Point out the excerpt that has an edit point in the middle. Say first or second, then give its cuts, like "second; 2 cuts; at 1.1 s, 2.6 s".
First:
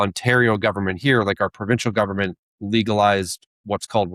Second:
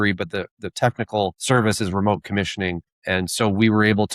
second; 2 cuts; at 1.4 s, 2.9 s